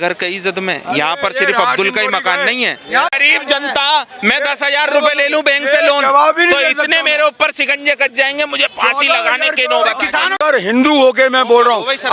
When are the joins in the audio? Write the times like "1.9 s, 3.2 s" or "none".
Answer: 3.1 s, 10.4 s